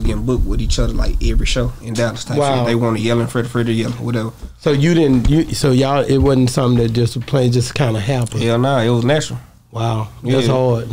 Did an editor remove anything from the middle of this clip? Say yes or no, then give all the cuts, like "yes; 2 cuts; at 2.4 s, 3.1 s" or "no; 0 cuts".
no; 0 cuts